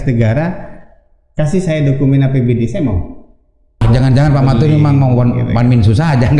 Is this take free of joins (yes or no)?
no